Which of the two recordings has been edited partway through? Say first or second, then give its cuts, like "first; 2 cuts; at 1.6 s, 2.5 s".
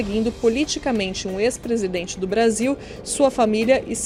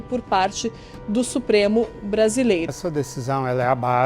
second; 1 cut; at 2.7 s